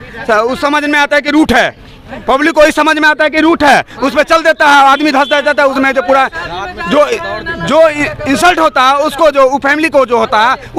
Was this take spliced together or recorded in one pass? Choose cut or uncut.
uncut